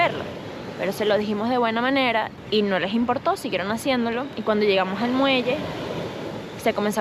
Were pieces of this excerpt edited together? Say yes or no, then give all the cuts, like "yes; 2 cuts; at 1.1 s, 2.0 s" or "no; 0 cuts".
yes; 1 cut; at 2.4 s